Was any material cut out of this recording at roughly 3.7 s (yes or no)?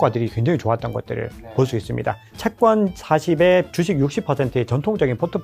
yes